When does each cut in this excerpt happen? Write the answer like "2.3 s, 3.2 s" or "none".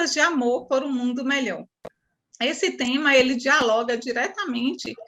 none